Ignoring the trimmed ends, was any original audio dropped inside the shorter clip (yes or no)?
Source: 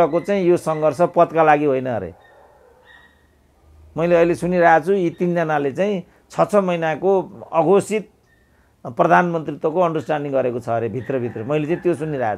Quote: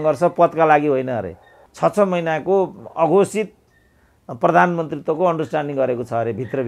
yes